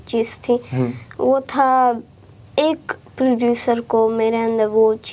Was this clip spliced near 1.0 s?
no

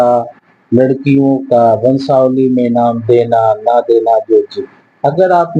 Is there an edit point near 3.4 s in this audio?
no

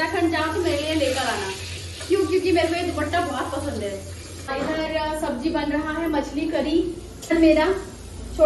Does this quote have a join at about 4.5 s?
yes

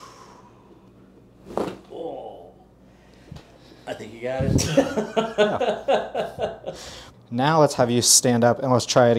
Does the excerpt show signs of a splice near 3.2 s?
no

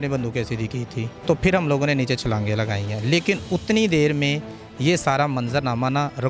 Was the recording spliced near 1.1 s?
yes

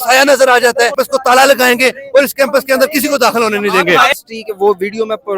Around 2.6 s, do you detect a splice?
no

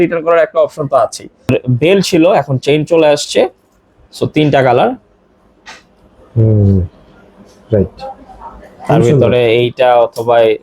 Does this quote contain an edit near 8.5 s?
no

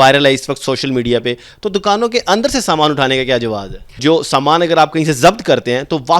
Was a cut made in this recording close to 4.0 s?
yes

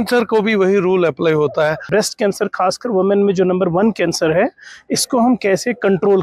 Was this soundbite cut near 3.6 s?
no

